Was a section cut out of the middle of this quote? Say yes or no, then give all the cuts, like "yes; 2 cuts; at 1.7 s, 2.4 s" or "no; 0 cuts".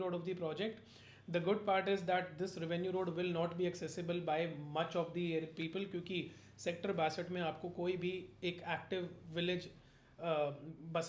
no; 0 cuts